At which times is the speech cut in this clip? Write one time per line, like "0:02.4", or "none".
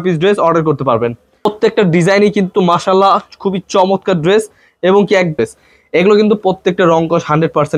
0:01.4
0:05.3